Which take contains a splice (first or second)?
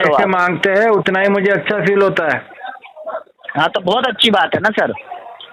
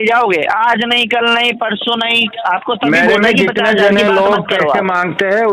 second